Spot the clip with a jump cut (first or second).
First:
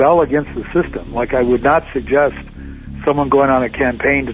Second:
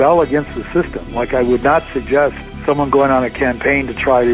second